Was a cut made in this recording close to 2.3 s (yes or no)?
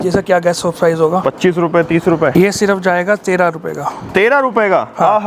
yes